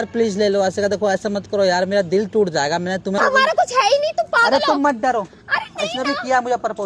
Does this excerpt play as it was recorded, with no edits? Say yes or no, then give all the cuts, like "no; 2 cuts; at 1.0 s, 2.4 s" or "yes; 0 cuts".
no; 1 cut; at 3.2 s